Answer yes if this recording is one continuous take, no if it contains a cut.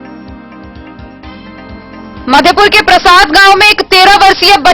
yes